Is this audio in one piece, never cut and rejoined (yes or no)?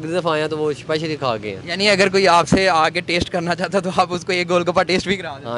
yes